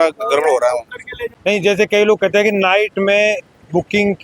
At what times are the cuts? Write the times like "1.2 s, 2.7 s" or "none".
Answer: 1.4 s